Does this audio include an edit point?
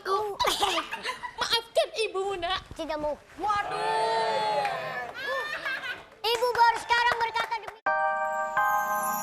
yes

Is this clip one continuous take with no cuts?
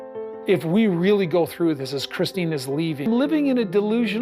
no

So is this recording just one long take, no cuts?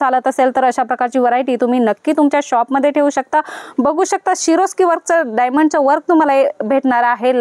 yes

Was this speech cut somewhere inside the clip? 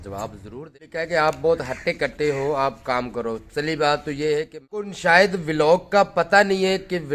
yes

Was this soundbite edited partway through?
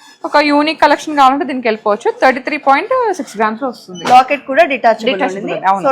no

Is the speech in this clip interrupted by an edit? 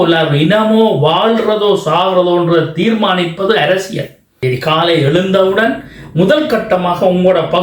yes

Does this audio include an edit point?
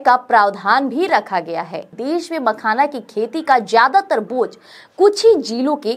yes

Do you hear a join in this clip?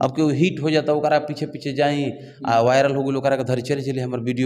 no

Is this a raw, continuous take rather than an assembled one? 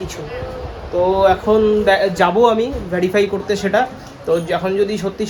yes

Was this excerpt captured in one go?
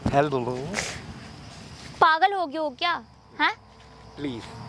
no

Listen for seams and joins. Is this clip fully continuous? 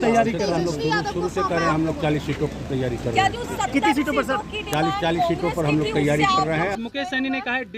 no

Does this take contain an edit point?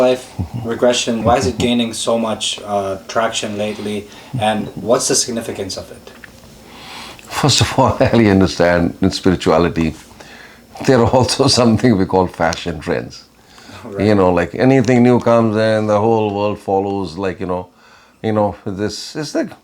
yes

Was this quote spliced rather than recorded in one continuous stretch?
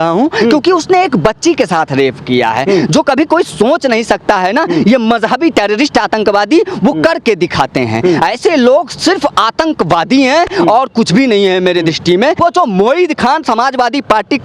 yes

